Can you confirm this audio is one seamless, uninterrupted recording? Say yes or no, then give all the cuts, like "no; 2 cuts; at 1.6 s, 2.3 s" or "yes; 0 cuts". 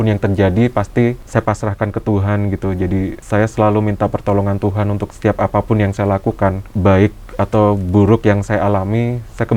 no; 4 cuts; at 1.2 s, 3.2 s, 5.1 s, 6.7 s